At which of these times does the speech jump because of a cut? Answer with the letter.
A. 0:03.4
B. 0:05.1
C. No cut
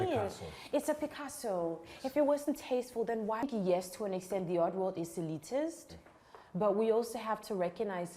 A